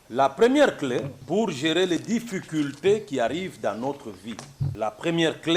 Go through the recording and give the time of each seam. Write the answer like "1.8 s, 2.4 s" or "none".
1.2 s, 4.6 s